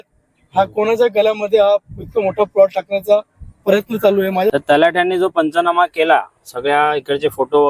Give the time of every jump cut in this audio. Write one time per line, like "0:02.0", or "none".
0:04.5